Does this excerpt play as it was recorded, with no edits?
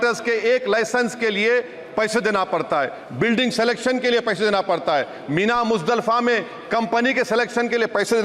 yes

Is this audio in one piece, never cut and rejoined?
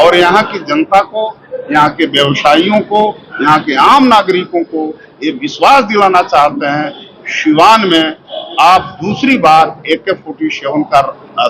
yes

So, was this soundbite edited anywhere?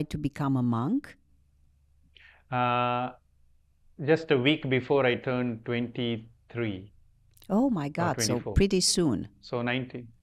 no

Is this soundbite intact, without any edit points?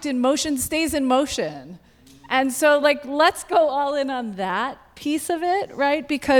yes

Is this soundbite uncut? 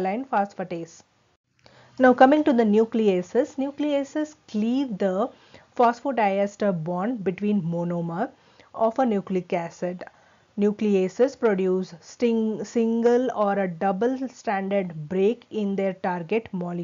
yes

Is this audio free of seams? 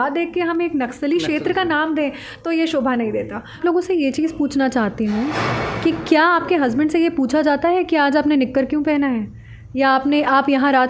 no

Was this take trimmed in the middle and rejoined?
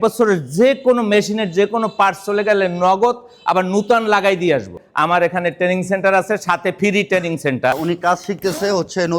yes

